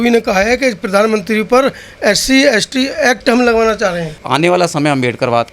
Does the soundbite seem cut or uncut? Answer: cut